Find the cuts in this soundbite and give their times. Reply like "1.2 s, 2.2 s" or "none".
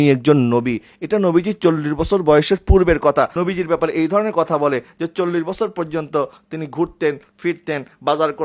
3.3 s